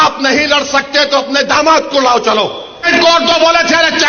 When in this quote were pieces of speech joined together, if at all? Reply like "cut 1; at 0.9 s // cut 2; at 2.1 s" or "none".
cut 1; at 2.9 s